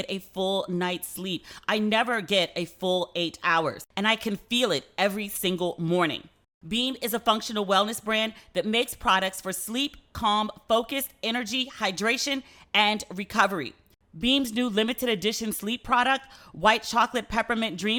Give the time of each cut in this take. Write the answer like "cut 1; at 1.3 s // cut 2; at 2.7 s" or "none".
none